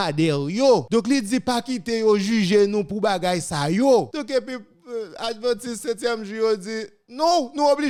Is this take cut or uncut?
uncut